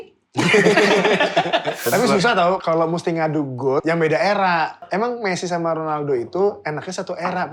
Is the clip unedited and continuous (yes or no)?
no